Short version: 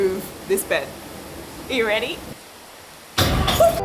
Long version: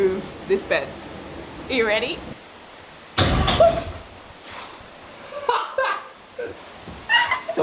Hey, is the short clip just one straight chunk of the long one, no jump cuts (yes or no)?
yes